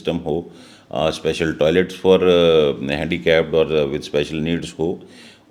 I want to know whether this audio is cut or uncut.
uncut